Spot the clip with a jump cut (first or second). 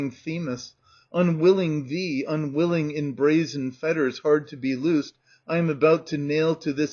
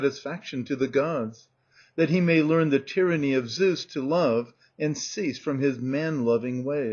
second